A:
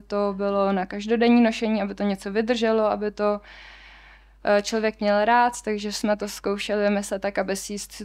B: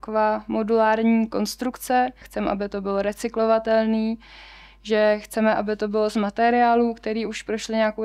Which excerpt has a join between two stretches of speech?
B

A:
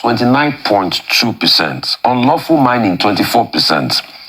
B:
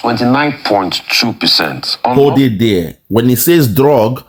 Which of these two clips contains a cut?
A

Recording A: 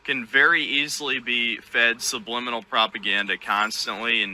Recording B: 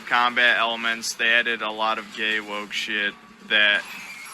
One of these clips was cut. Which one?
B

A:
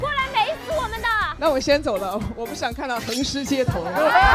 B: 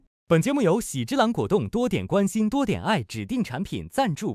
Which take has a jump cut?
A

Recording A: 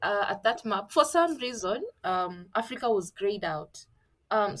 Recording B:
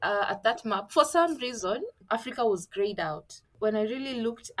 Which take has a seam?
B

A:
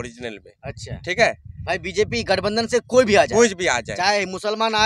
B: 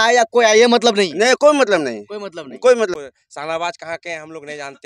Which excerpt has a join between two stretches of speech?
B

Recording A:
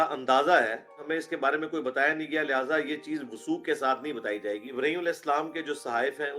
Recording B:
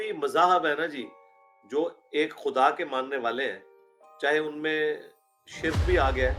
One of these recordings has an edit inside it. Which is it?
A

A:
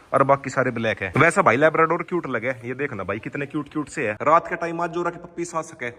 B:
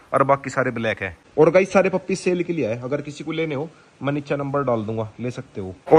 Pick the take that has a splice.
A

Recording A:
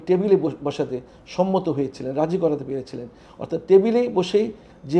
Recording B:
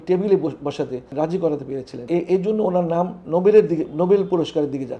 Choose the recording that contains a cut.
B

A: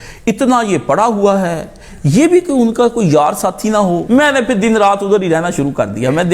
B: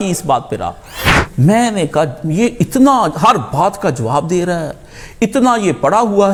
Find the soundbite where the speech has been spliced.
A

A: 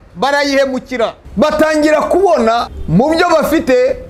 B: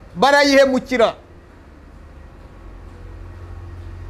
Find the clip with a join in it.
A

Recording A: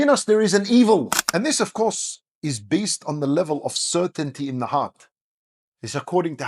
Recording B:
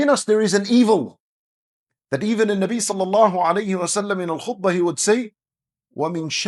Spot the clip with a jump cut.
A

